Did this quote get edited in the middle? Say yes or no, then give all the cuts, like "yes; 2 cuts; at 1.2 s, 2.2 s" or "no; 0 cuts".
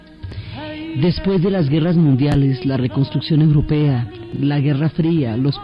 no; 0 cuts